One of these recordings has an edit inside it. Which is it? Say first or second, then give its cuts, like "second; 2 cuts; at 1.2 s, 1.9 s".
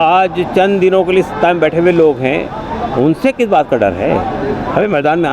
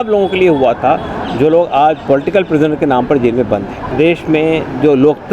second; 1 cut; at 3.9 s